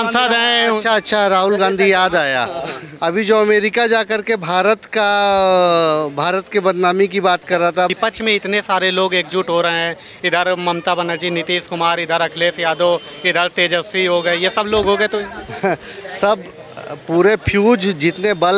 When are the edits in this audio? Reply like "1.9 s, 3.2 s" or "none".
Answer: 7.9 s